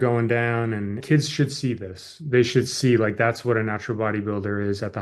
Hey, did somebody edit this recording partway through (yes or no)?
yes